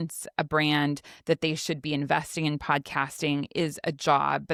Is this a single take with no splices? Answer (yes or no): yes